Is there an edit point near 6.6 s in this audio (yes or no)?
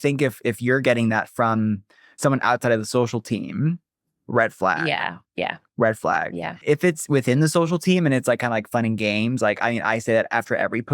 yes